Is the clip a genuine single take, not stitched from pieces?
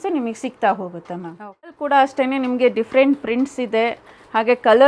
no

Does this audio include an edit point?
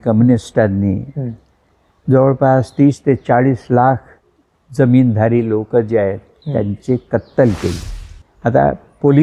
yes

